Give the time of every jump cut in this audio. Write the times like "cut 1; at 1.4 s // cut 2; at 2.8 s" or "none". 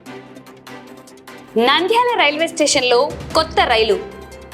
cut 1; at 1.5 s